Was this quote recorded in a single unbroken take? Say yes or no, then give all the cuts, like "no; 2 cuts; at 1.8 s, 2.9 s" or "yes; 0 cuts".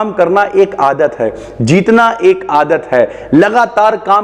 yes; 0 cuts